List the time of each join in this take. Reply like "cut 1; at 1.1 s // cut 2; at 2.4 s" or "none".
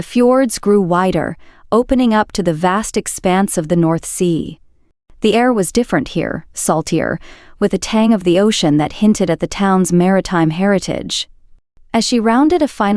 none